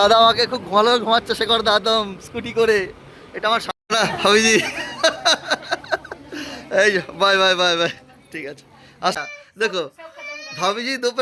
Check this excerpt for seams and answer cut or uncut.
cut